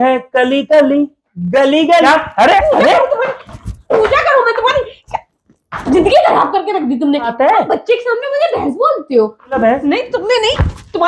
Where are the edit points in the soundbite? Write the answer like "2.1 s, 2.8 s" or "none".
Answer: 2.0 s, 7.3 s, 9.6 s